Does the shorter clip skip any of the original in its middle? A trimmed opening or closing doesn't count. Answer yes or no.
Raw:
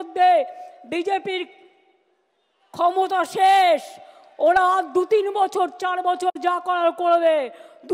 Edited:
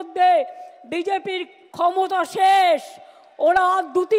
yes